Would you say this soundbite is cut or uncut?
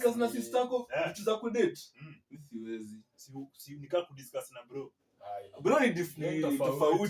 uncut